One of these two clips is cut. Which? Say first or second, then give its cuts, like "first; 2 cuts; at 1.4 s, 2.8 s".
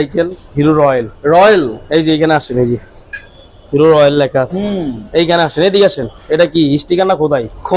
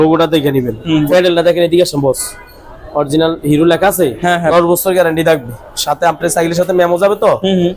second; 2 cuts; at 1.1 s, 4.5 s